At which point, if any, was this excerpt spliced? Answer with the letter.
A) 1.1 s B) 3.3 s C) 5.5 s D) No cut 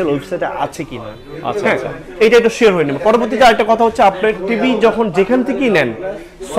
D